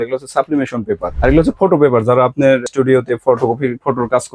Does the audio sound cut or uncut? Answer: cut